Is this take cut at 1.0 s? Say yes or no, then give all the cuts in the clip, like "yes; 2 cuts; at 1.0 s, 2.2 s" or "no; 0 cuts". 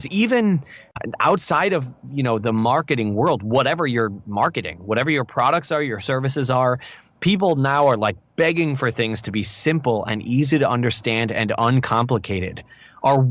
yes; 1 cut; at 1.0 s